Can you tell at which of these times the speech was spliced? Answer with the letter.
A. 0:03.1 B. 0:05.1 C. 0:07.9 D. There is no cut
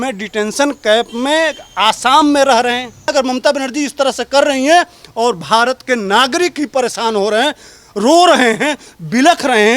A